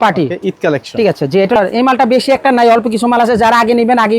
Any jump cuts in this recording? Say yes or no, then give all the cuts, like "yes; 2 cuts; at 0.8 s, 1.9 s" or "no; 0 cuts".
yes; 1 cut; at 1.6 s